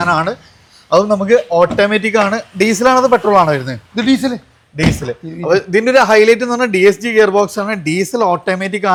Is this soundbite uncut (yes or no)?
yes